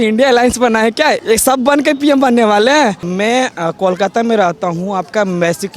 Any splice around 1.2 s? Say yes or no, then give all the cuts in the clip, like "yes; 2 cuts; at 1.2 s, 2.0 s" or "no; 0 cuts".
yes; 2 cuts; at 1.2 s, 3.0 s